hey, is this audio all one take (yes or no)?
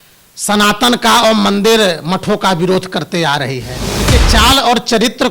no